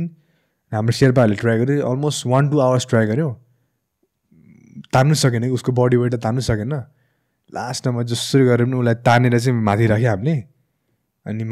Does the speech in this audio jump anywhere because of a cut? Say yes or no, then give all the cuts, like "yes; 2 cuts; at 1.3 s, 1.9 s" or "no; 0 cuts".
no; 0 cuts